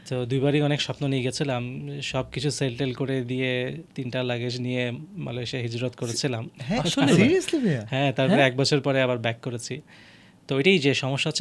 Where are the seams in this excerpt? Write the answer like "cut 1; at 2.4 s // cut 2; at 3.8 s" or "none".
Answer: none